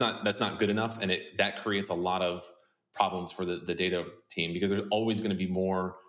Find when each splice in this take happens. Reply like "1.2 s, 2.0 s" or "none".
none